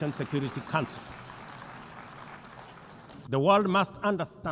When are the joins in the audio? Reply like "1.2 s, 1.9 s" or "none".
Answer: 3.2 s